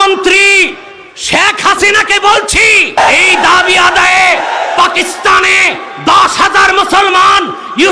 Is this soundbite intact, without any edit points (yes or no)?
no